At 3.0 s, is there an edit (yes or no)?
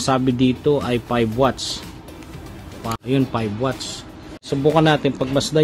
yes